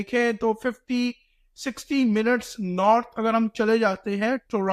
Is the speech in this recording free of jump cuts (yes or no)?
yes